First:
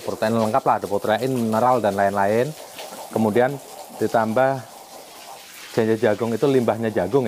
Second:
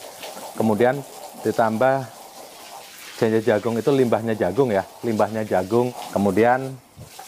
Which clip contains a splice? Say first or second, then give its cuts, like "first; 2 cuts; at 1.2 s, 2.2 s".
second; 1 cut; at 6.0 s